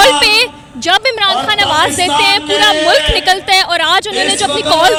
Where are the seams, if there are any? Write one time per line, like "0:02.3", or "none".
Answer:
none